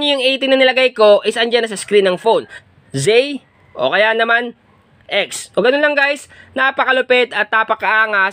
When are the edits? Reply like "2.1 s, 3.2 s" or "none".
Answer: 2.5 s